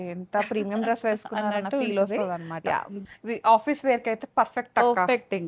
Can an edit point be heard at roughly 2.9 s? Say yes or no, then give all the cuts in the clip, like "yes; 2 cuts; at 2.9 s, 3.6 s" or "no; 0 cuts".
yes; 1 cut; at 2.9 s